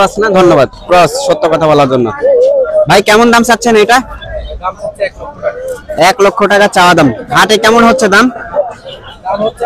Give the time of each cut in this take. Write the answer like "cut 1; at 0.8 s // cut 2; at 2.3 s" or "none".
none